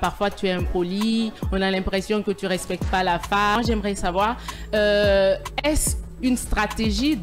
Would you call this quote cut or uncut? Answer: uncut